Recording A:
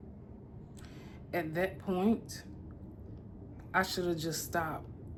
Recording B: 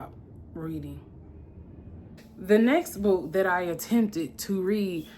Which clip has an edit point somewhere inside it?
B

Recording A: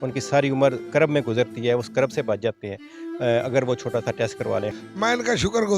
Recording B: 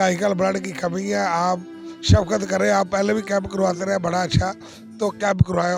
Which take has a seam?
A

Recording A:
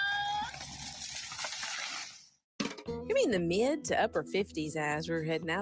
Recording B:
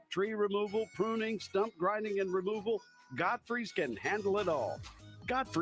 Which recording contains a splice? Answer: A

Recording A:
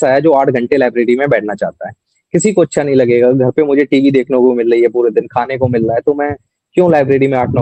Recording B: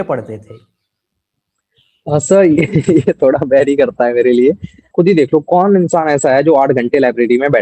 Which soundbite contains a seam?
B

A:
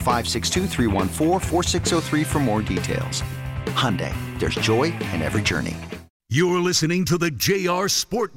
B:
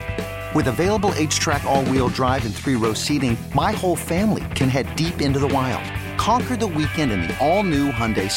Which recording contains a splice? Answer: A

